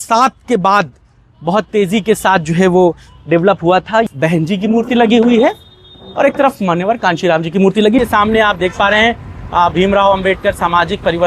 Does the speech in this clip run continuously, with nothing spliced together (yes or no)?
no